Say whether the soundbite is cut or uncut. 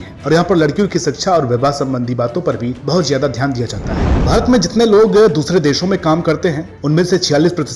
cut